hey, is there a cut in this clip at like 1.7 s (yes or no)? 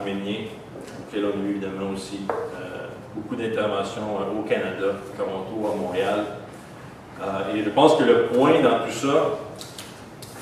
yes